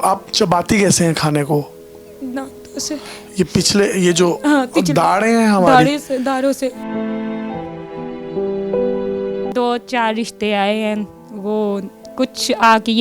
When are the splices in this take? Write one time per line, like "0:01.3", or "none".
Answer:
0:09.5

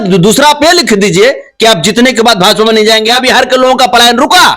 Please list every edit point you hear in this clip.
0:03.2

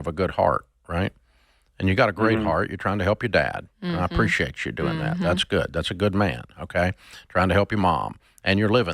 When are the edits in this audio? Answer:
0:07.1

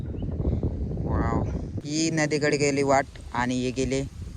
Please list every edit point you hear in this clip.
0:01.7

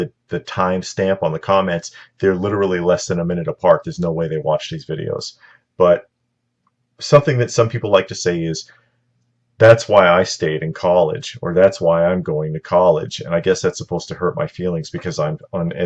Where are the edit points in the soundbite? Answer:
0:03.5

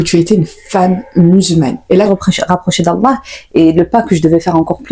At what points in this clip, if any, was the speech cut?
0:02.1
0:03.3

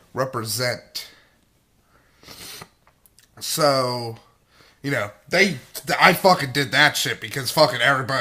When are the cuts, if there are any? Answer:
none

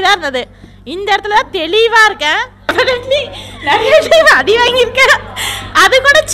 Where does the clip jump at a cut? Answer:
0:02.7

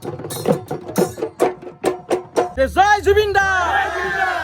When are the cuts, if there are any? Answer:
0:02.6

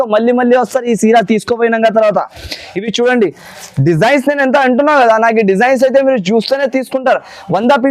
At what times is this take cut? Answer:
none

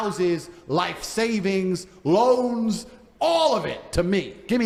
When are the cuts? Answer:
none

